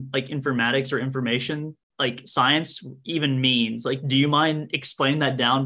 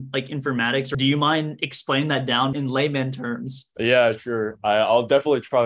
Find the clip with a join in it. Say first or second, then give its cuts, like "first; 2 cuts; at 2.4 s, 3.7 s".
second; 3 cuts; at 0.9 s, 2.6 s, 3.6 s